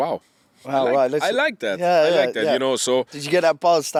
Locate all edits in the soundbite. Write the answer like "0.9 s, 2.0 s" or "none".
none

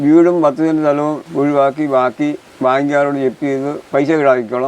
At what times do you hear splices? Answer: 1.2 s, 2.5 s, 3.8 s

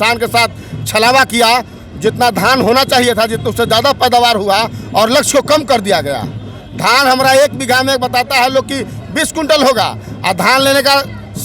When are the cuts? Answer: none

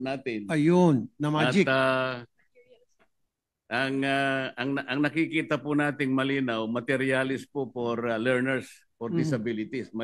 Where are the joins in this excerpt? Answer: none

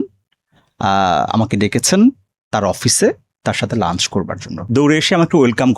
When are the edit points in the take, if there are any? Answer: 4.6 s

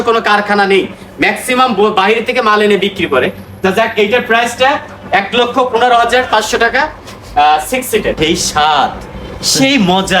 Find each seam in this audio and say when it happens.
8.2 s

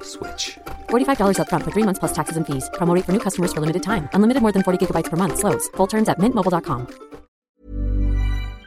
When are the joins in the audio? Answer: 7.6 s

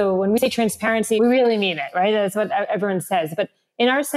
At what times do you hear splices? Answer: 1.1 s

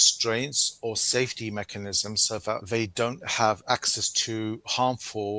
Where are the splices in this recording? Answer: 2.6 s

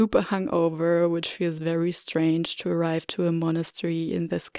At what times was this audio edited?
none

